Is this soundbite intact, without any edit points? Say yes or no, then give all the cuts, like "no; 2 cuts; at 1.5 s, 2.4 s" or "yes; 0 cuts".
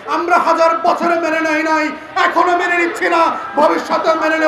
yes; 0 cuts